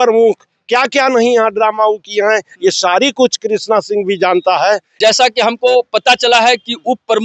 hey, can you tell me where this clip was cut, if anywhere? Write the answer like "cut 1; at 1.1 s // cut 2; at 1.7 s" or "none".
cut 1; at 4.9 s